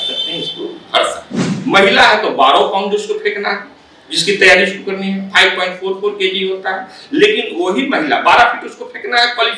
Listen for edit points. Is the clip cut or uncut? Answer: cut